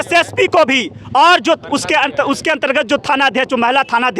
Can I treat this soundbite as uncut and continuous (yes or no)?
yes